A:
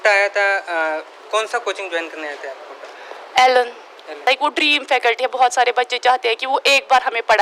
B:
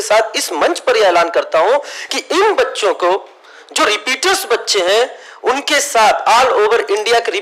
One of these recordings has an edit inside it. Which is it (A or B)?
A